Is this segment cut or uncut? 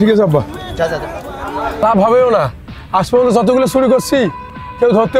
cut